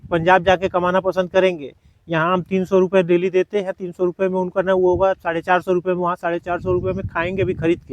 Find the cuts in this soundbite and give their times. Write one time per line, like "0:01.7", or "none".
none

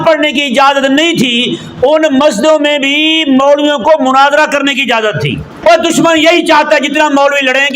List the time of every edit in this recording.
0:05.5

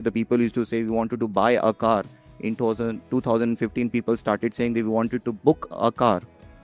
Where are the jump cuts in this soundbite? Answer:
none

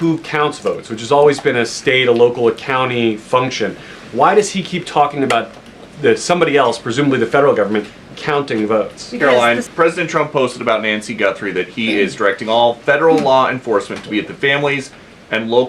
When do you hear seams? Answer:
0:09.2

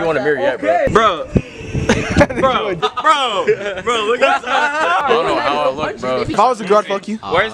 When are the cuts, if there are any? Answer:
0:00.9
0:02.8
0:05.0
0:06.3

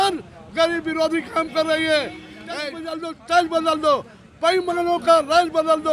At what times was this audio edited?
0:02.7

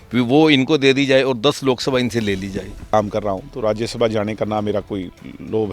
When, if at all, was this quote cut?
0:02.8

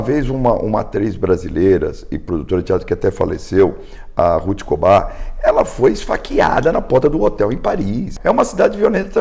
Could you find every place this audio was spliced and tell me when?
0:08.1

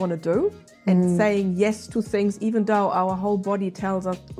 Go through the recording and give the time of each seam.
none

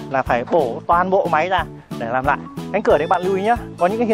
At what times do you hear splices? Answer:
0:02.5

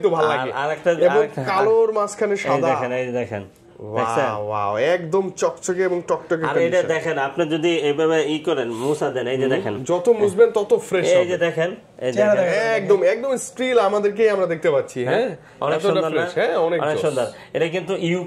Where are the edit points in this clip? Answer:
none

